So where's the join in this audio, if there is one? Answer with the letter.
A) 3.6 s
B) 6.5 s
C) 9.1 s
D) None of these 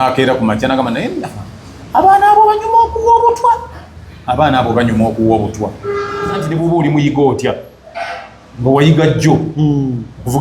B